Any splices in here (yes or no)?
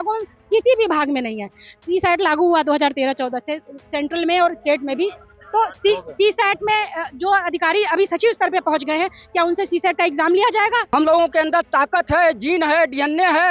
yes